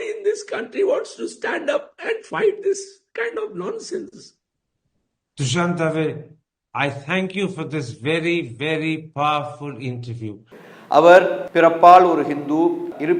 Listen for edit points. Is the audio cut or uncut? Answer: cut